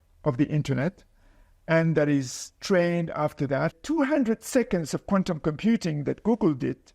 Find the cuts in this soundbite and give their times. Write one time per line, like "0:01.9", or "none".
0:03.7